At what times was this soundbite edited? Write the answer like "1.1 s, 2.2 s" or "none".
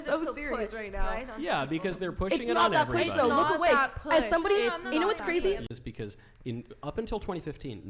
5.7 s